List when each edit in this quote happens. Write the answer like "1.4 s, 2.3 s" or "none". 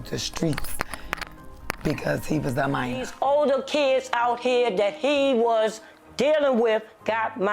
3.1 s